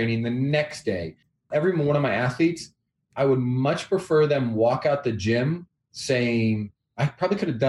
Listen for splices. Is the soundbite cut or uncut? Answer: cut